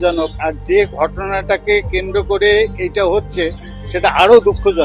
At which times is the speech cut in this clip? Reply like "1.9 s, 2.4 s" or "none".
none